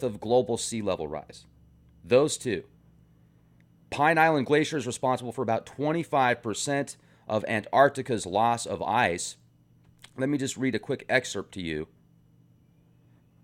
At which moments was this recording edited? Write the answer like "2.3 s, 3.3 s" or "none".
none